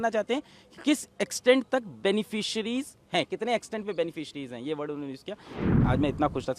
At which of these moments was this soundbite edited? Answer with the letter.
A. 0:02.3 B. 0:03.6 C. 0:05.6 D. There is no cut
C